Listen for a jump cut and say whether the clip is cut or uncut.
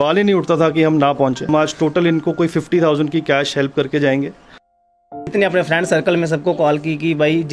cut